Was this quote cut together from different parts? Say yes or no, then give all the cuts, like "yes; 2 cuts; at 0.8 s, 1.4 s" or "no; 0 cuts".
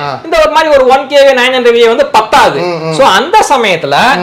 no; 0 cuts